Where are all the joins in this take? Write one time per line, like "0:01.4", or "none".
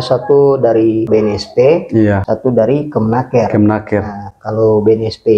0:01.1
0:02.2